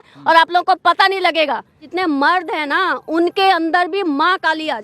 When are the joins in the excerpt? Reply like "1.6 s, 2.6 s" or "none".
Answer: 1.9 s